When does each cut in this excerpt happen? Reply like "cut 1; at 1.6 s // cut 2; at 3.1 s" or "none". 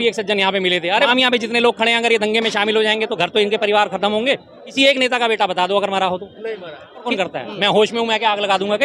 cut 1; at 1.1 s // cut 2; at 4.6 s // cut 3; at 7.1 s